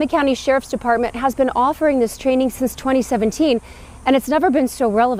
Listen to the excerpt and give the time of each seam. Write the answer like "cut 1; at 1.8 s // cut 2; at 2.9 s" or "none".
none